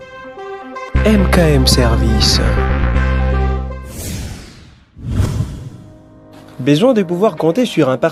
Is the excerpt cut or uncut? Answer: uncut